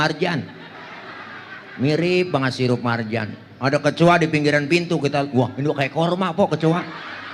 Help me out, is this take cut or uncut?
uncut